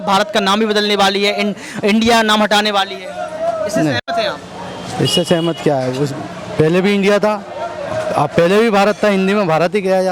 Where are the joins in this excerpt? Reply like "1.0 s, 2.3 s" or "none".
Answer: none